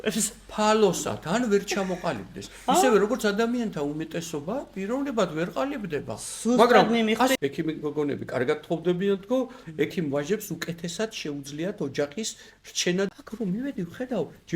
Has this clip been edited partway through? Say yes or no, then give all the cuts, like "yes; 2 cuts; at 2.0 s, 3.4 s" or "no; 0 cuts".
yes; 2 cuts; at 7.4 s, 13.1 s